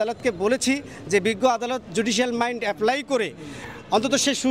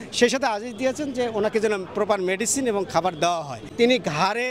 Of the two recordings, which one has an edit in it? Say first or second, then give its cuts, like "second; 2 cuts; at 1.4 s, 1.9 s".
second; 1 cut; at 3.6 s